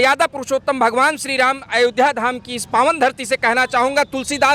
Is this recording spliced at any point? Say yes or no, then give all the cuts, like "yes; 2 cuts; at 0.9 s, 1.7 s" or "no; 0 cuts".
no; 0 cuts